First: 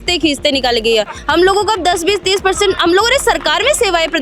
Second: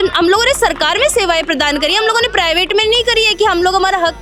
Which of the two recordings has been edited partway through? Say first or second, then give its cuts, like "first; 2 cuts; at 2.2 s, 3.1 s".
first; 1 cut; at 1.2 s